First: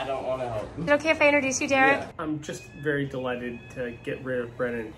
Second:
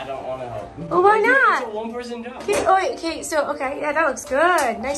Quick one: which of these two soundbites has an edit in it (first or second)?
first